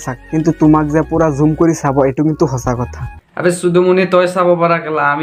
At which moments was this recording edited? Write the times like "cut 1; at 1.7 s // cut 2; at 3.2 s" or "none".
none